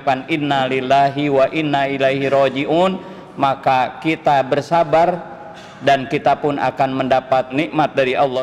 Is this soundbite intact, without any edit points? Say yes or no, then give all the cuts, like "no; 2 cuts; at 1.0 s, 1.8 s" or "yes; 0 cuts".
no; 1 cut; at 7.5 s